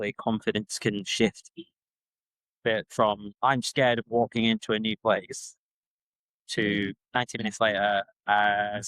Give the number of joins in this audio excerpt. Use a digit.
1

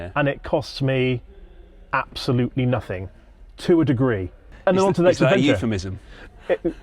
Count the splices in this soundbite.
1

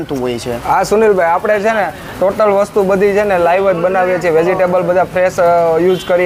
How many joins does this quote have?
0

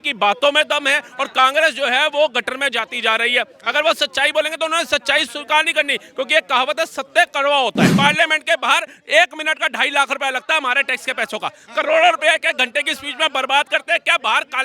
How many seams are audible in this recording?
1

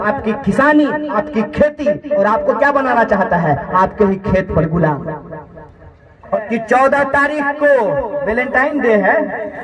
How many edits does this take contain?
1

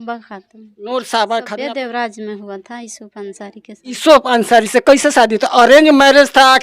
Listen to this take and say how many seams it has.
1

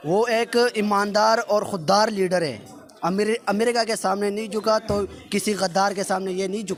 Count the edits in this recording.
0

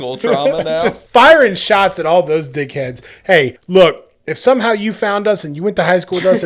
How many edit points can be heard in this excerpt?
1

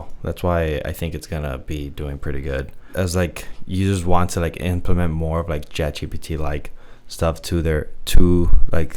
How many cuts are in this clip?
1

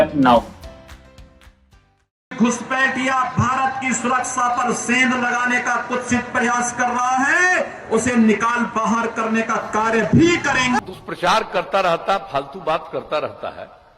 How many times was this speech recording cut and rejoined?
2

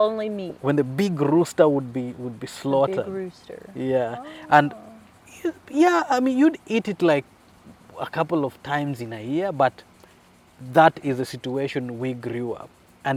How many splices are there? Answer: 0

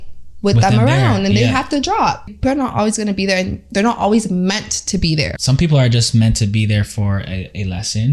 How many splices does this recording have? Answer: 2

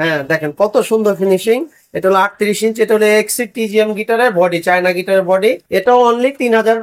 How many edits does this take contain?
1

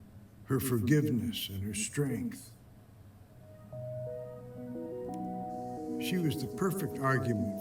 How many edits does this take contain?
0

